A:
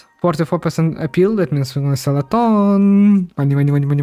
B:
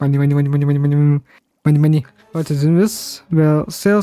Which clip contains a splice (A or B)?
B